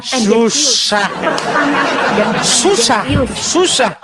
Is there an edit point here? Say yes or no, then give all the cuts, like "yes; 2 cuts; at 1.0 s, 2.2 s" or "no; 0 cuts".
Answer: no; 0 cuts